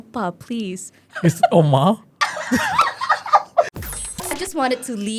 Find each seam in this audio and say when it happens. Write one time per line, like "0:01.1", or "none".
0:03.7